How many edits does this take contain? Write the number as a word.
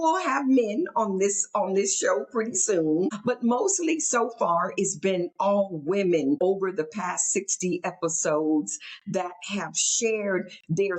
two